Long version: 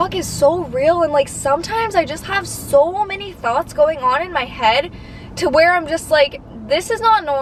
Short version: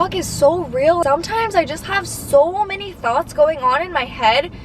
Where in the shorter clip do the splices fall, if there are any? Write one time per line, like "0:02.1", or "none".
0:01.0